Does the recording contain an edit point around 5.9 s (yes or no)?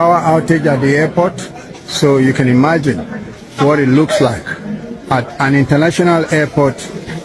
no